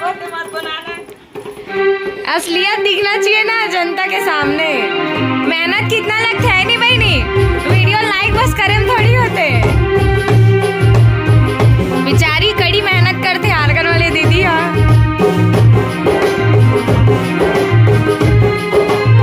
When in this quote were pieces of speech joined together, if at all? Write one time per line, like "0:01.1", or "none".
none